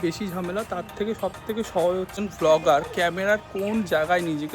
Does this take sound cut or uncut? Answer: cut